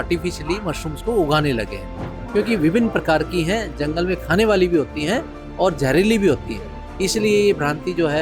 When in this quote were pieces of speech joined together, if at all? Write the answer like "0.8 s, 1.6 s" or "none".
2.1 s